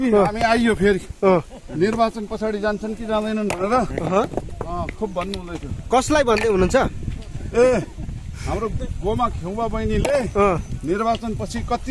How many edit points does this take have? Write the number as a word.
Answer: zero